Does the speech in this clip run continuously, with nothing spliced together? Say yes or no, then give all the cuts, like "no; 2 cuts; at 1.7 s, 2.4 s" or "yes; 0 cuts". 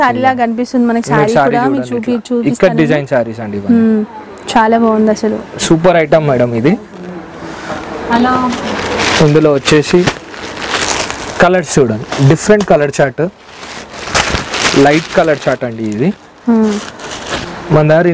yes; 0 cuts